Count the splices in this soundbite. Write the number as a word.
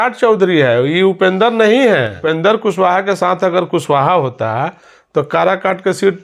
one